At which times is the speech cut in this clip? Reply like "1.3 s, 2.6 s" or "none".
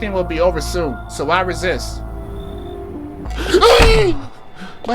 1.0 s